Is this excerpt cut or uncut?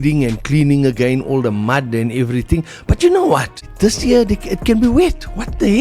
cut